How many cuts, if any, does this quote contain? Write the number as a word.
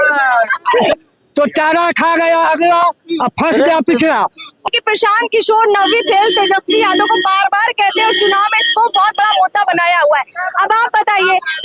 two